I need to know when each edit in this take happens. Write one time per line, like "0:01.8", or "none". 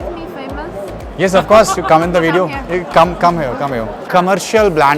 0:04.0